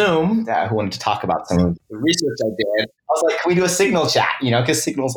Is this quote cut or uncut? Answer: cut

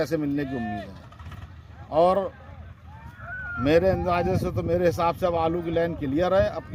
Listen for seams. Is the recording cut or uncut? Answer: uncut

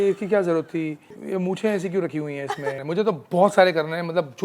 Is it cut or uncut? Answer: cut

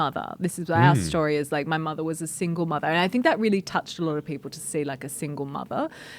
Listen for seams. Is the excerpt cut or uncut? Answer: uncut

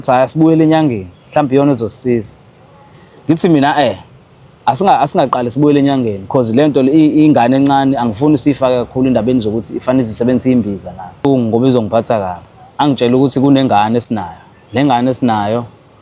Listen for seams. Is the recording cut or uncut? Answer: cut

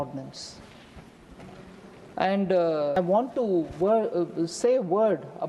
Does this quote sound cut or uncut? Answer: cut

